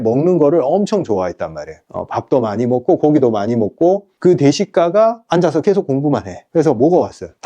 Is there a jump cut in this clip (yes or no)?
yes